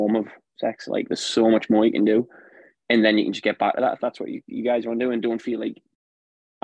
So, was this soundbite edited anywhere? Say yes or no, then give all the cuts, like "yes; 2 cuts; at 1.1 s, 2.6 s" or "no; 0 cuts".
no; 0 cuts